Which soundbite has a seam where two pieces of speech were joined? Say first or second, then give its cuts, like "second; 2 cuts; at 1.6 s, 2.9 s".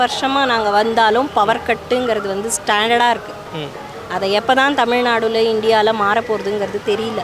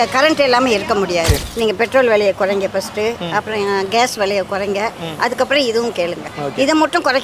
second; 1 cut; at 1.4 s